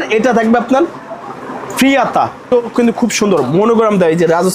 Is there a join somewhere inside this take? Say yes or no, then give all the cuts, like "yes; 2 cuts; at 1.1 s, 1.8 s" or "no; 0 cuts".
yes; 1 cut; at 2.5 s